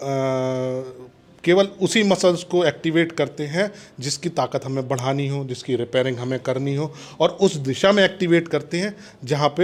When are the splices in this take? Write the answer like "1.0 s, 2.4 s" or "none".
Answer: none